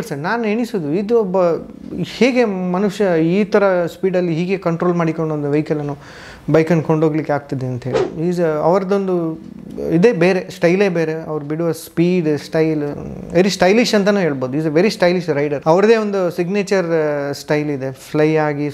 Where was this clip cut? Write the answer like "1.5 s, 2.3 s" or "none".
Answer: 8.0 s, 15.6 s